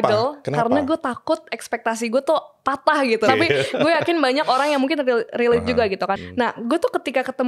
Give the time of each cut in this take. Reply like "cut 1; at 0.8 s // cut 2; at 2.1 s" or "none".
cut 1; at 3.3 s // cut 2; at 6.2 s